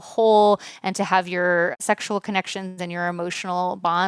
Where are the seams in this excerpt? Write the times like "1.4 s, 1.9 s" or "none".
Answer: 1.8 s